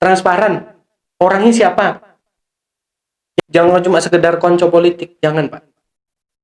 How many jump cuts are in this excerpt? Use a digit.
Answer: 1